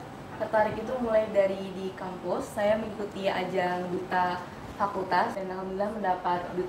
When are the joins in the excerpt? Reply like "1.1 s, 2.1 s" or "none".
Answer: 5.3 s